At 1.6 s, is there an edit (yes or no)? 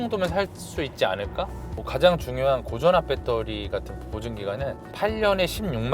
yes